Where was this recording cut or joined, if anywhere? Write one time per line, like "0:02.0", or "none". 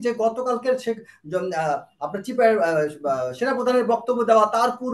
none